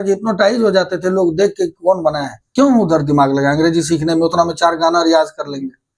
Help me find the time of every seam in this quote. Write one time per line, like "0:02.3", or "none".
0:02.4